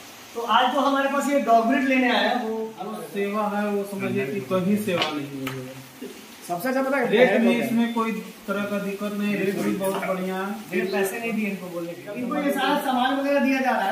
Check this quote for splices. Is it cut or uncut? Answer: cut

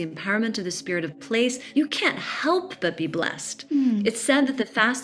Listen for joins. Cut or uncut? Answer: cut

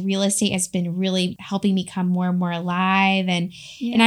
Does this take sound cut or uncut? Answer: cut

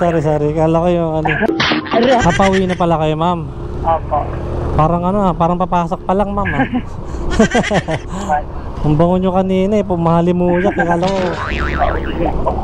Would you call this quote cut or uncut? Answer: cut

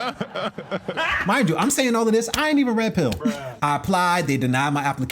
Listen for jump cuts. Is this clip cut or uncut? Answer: cut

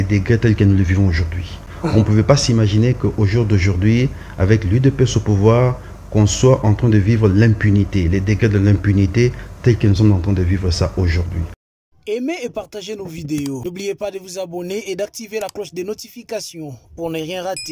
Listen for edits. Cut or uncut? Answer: uncut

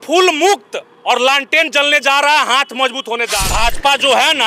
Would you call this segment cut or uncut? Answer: cut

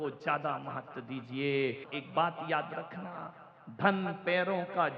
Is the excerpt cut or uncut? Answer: cut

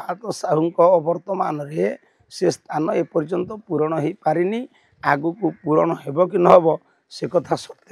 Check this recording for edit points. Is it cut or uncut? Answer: uncut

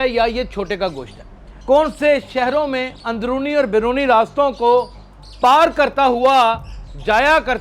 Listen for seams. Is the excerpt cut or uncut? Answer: cut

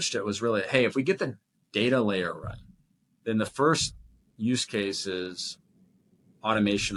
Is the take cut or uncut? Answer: uncut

